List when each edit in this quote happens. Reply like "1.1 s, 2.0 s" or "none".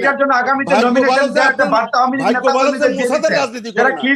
none